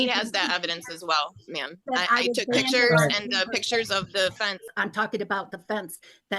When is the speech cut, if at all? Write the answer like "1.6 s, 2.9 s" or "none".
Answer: 4.6 s